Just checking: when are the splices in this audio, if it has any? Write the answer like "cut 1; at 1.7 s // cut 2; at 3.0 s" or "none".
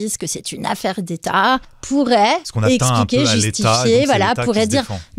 cut 1; at 1.7 s // cut 2; at 2.5 s